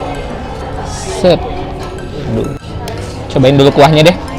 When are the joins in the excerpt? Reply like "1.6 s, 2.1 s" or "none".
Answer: 2.6 s